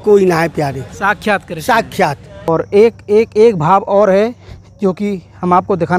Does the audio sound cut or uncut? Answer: cut